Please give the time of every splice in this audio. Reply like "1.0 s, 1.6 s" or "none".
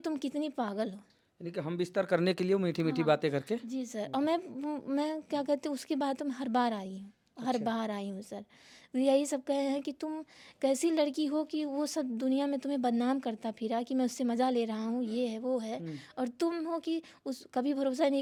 none

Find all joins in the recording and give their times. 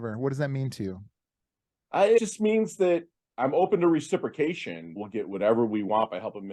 2.2 s, 5.0 s

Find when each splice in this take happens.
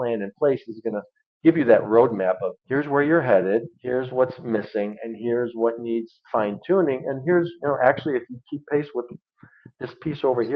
2.5 s, 3.8 s

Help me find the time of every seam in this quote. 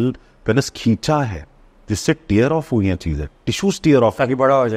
none

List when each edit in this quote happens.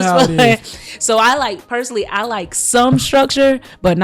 none

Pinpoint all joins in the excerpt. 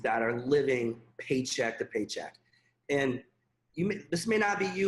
none

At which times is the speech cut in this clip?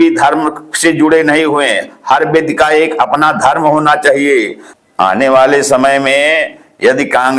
4.6 s

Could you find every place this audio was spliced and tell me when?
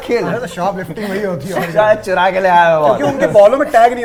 none

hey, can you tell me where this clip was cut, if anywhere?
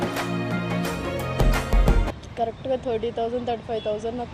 2.1 s

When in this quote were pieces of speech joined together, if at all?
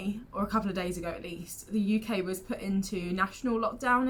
none

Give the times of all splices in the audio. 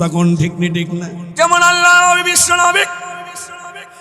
1.2 s

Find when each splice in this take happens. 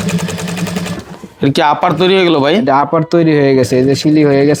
none

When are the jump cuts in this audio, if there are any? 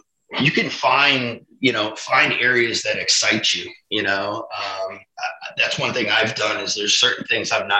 none

